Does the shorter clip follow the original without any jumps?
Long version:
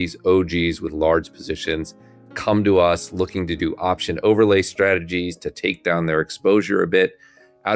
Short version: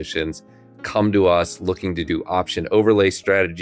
yes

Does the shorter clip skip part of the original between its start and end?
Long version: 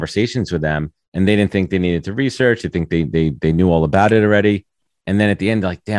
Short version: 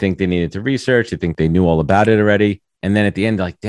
yes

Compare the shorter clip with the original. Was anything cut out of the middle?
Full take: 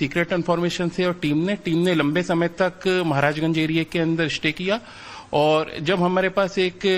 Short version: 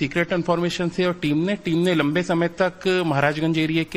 no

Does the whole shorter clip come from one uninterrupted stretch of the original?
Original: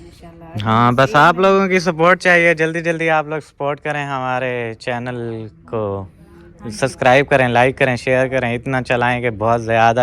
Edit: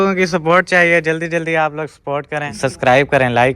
no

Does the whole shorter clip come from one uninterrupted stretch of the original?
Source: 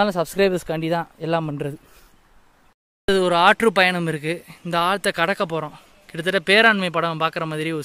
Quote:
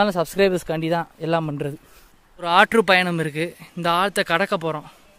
no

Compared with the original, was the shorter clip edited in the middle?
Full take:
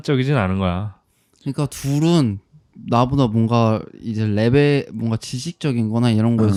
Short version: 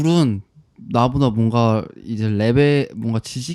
no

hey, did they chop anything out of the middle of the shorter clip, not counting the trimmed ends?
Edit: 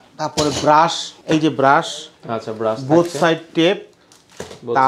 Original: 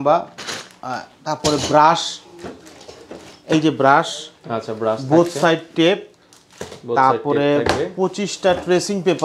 yes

